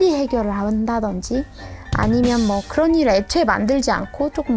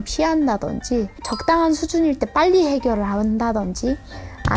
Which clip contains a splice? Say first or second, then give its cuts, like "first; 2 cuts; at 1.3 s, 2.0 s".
second; 1 cut; at 1.2 s